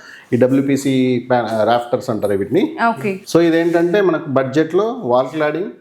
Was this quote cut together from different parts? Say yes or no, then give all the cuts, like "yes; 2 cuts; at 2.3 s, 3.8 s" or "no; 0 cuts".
yes; 1 cut; at 3.2 s